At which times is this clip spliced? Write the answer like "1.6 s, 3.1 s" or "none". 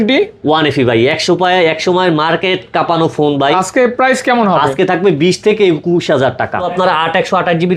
6.7 s